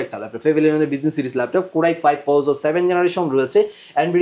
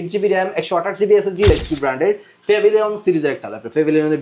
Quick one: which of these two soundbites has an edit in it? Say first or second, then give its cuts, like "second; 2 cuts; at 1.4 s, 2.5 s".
second; 1 cut; at 1.5 s